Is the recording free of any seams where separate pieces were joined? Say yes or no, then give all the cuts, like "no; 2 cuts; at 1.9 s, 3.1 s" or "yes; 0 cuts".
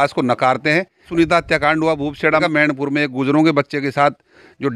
no; 2 cuts; at 1.1 s, 2.4 s